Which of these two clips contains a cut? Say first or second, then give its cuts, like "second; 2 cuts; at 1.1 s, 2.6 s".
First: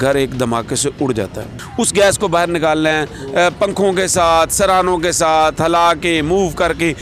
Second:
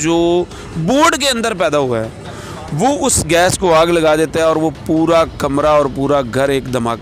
first; 1 cut; at 1.6 s